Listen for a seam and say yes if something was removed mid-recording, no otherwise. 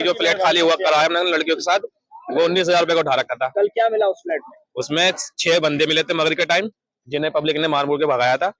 no